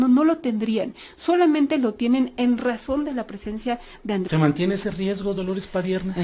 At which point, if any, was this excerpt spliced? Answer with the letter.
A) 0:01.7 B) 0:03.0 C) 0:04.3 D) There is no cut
C